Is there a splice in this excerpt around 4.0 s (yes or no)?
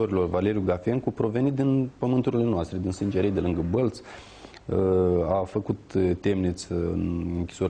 no